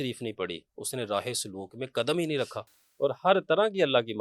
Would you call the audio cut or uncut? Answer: cut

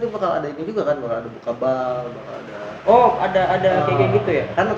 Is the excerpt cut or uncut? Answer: uncut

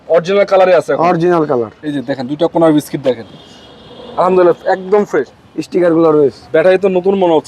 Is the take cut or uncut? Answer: cut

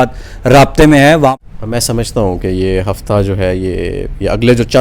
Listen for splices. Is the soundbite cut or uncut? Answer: cut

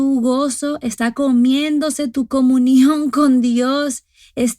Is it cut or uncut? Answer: cut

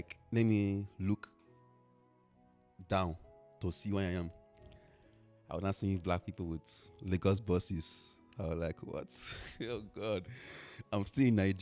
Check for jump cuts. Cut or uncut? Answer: uncut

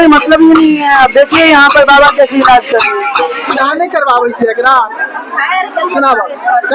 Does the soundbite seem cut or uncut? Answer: cut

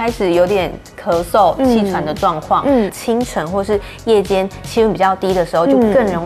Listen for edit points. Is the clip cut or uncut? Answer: cut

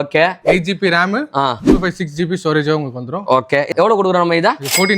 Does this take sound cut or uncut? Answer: cut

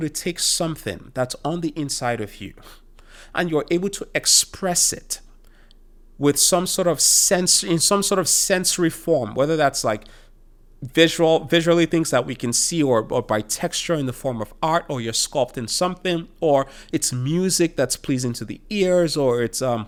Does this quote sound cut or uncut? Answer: uncut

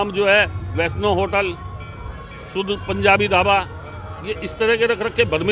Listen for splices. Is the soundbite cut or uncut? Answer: uncut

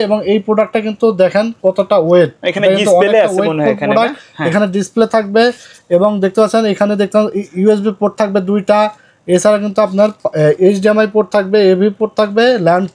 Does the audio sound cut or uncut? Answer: uncut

